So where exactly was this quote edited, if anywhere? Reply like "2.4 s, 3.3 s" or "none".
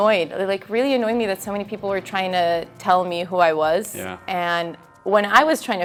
none